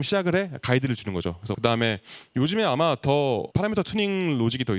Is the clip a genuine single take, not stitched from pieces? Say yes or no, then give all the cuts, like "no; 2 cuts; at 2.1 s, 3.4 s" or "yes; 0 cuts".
no; 2 cuts; at 1.6 s, 3.5 s